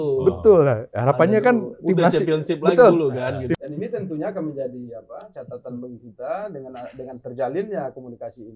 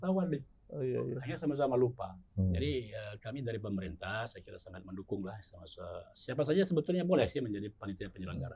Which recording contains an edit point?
first; 1 cut; at 3.5 s

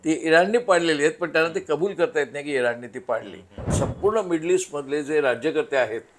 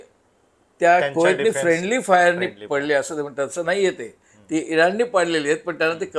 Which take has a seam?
first; 1 cut; at 3.7 s

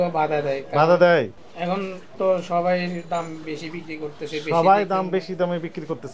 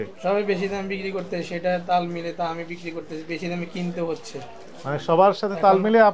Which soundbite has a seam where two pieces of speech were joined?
first; 1 cut; at 1.3 s

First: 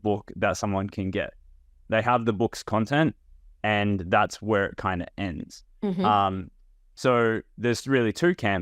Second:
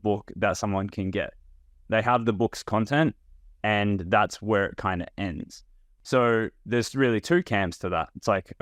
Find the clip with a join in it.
second; 1 cut; at 5.6 s

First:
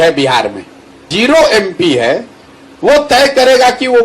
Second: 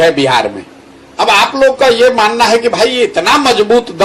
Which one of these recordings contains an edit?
first; 1 cut; at 1.1 s

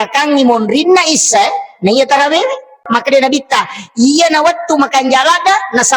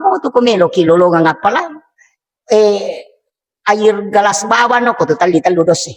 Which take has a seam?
first; 1 cut; at 2.9 s

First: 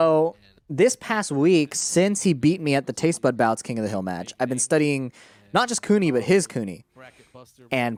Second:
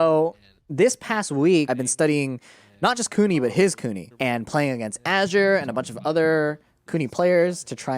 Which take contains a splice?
second; 2 cuts; at 1.7 s, 4.1 s

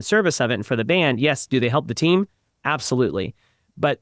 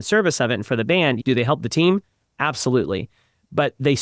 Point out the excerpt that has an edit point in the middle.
second; 1 cut; at 1.2 s

